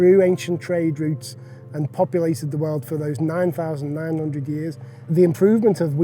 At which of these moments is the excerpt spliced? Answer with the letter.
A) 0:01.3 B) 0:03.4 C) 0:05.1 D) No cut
C